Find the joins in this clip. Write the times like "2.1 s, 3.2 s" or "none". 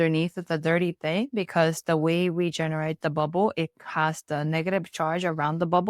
none